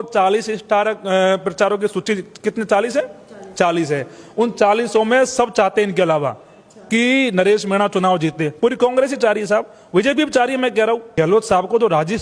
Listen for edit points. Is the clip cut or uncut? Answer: cut